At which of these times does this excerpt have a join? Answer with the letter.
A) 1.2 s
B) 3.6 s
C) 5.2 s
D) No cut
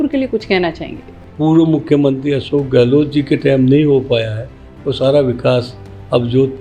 A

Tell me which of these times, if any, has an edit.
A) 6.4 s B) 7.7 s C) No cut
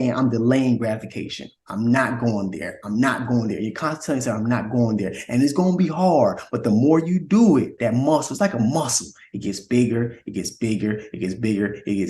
B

